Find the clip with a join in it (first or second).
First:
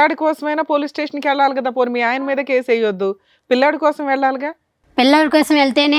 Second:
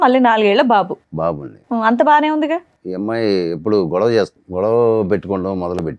second